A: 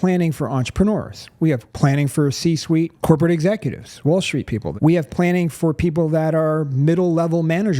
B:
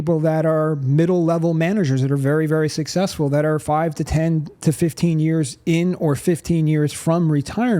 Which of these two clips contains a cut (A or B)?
A